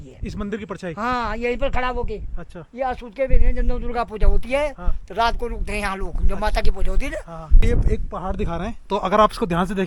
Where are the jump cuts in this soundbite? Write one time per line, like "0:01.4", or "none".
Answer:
0:07.6